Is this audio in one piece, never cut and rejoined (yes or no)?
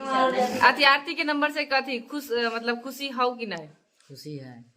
yes